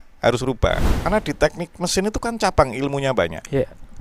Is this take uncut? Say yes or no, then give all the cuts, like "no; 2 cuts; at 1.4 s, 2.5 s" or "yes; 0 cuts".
no; 1 cut; at 1.0 s